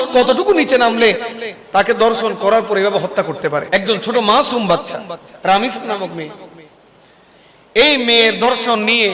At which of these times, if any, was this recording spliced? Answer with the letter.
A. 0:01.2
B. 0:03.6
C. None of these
B